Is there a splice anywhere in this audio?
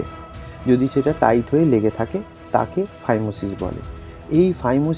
no; 0 cuts

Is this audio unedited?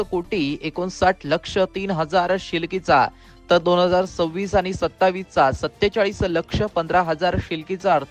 yes; 0 cuts

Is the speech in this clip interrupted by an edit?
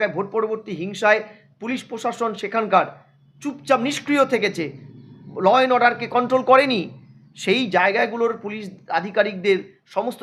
no; 0 cuts

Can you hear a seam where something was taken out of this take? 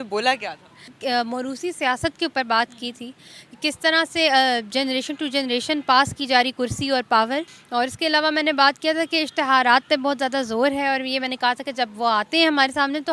yes; 2 cuts; at 0.9 s, 7.6 s

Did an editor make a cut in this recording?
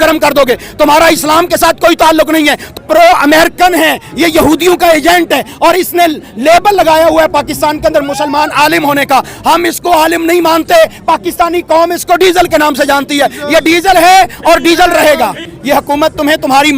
yes; 2 cuts; at 2.8 s, 15.5 s

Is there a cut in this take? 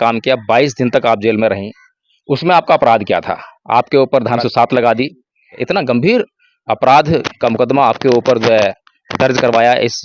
yes; 2 cuts; at 4.4 s, 5.6 s

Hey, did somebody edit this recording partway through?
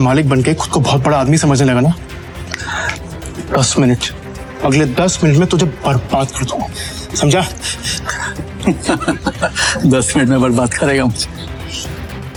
no; 0 cuts

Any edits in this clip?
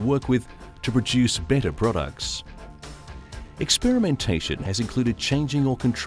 yes; 1 cut; at 4.6 s

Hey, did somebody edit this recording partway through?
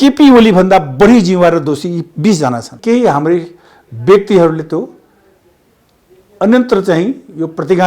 yes; 1 cut; at 2.7 s

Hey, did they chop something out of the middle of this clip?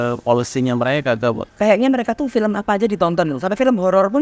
yes; 1 cut; at 1.5 s

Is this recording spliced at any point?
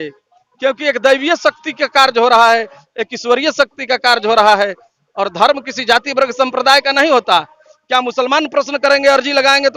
no; 0 cuts

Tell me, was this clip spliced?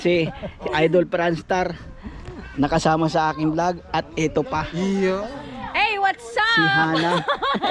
no; 0 cuts

